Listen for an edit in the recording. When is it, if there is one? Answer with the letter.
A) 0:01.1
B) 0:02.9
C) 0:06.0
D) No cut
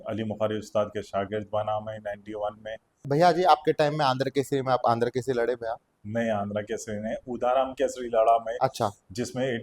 B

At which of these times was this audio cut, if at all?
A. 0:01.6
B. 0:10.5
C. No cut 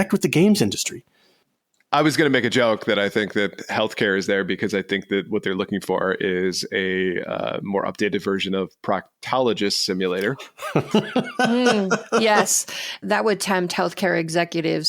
A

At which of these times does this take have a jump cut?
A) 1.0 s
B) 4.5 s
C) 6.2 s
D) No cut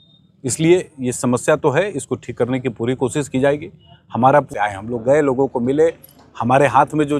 B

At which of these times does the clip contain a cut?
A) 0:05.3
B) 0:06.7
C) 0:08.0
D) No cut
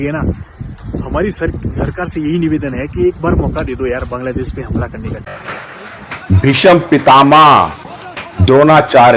A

